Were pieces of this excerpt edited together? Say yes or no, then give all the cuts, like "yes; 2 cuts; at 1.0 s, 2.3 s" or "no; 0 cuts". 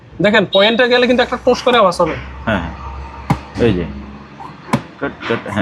no; 0 cuts